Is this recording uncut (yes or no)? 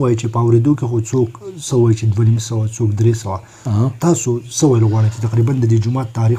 yes